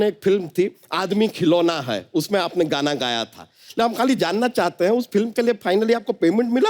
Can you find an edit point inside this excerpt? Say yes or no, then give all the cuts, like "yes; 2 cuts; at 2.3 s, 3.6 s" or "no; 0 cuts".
no; 0 cuts